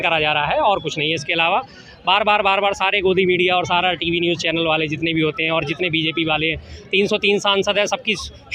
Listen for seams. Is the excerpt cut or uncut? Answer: uncut